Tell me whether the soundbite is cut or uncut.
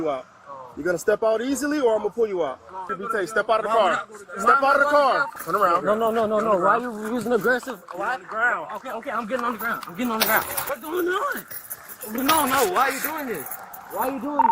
cut